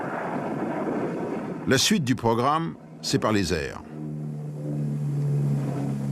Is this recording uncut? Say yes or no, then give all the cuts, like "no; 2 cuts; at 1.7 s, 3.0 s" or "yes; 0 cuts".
no; 1 cut; at 1.8 s